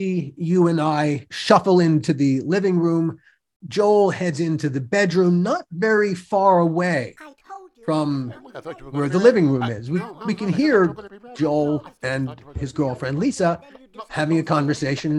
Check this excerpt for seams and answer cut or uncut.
cut